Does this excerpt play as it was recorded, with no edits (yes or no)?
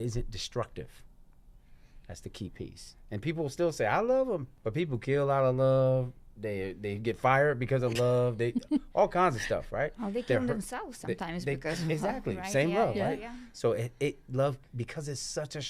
no